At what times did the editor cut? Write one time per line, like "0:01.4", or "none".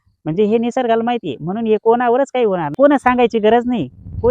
0:02.7

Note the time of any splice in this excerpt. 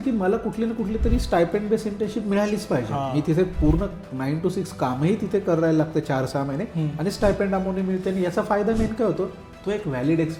none

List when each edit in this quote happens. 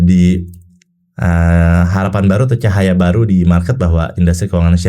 none

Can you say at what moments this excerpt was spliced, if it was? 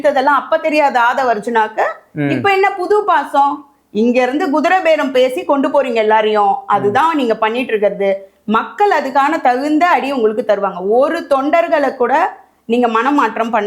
none

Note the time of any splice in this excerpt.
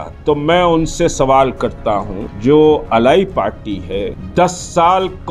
0:02.2
0:04.2

